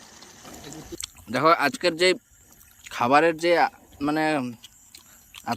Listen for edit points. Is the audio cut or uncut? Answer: cut